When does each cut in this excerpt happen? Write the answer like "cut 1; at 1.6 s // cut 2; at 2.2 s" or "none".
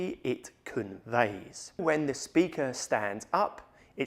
cut 1; at 1.8 s